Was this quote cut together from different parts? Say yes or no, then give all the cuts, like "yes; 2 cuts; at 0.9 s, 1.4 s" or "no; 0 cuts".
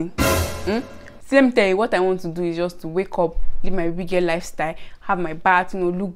no; 0 cuts